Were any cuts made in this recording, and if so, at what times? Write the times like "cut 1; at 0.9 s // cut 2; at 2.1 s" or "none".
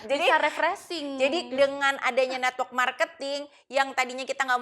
none